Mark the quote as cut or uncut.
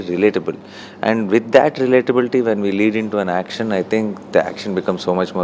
uncut